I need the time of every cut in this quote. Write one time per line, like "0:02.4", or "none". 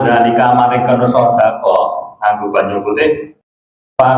none